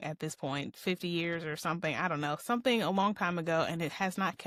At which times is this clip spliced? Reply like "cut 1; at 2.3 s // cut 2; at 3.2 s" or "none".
none